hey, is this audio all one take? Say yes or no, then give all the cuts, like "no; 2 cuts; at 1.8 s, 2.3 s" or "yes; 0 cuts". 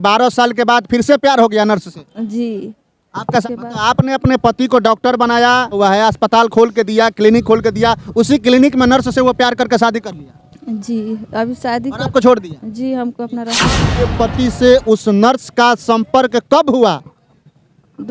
no; 3 cuts; at 3.4 s, 5.8 s, 13.9 s